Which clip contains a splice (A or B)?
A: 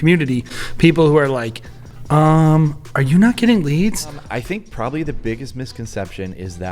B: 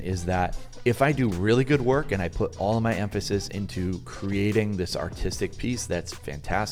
A